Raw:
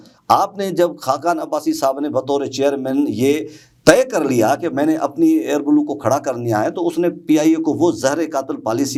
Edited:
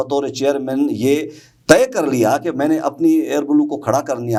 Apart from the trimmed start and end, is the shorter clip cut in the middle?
no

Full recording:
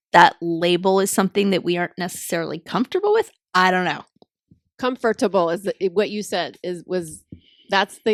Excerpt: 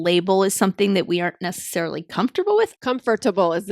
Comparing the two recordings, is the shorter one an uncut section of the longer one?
no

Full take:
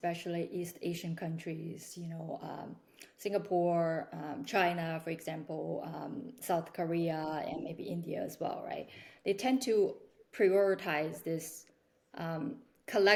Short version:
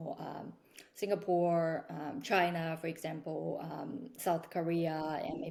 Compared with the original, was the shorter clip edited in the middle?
no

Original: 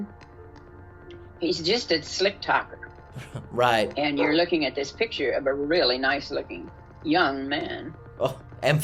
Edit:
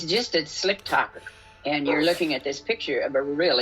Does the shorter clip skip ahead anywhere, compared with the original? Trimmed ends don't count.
yes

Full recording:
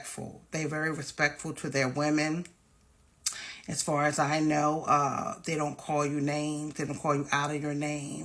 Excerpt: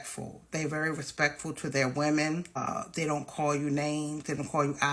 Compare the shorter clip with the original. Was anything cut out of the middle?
yes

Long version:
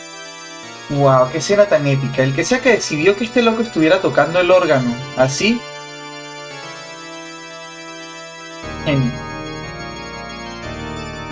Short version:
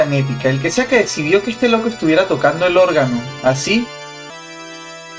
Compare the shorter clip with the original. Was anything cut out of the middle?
yes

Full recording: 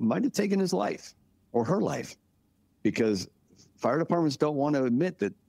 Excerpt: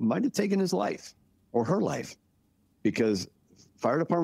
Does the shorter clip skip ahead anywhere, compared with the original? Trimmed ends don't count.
no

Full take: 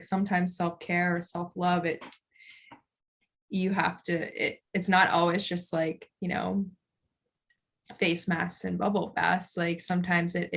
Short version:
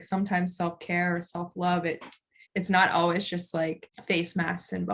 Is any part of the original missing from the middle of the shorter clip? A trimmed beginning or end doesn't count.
yes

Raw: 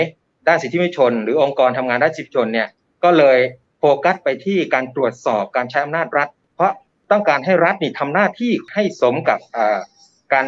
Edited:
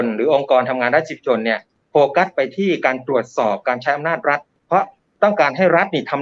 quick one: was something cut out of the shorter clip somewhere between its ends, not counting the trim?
yes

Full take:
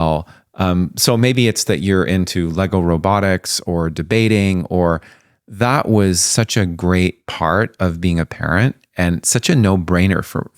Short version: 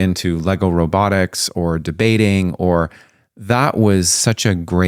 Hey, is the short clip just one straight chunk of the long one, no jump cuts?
yes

